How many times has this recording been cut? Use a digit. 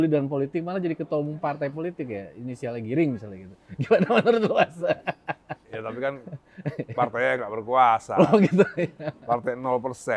0